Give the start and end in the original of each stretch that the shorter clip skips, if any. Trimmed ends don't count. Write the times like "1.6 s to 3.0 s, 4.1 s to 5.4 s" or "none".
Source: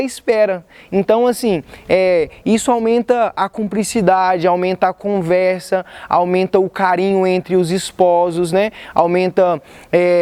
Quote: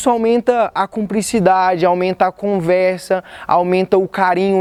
none